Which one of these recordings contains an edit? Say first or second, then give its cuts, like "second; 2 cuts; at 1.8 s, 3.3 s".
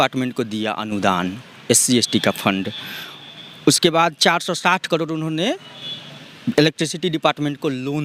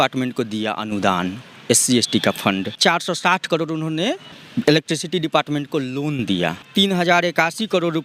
second; 3 cuts; at 2.8 s, 4.3 s, 6.7 s